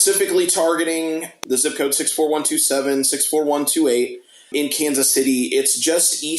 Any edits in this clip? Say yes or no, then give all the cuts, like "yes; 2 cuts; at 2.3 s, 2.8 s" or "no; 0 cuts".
no; 0 cuts